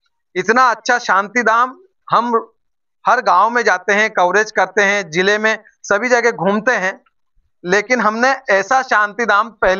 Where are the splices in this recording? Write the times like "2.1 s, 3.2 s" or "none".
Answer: none